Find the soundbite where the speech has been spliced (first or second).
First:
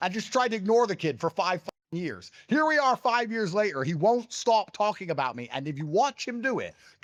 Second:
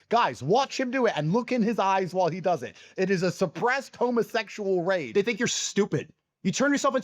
second